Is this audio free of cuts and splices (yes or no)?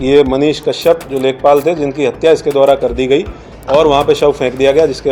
yes